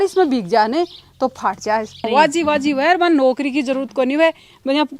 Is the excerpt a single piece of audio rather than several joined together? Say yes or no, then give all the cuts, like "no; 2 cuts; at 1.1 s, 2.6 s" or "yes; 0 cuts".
no; 1 cut; at 2.1 s